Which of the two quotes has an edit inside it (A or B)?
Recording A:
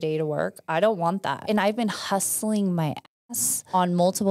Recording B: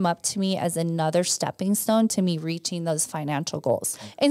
A